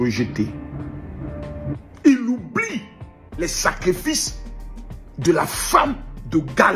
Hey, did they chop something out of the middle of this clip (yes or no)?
yes